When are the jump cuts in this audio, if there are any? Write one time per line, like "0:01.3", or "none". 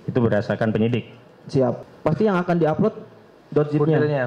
0:01.8